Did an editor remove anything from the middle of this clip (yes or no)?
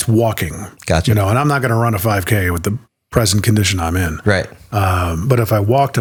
no